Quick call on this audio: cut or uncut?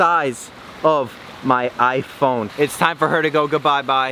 cut